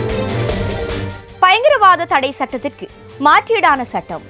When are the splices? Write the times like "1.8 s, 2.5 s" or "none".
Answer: 1.2 s